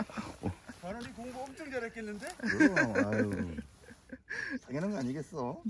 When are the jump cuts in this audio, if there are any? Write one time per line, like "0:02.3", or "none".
none